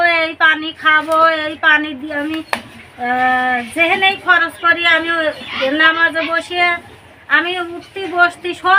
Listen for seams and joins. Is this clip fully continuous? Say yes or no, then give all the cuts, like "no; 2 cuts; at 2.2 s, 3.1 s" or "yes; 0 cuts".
yes; 0 cuts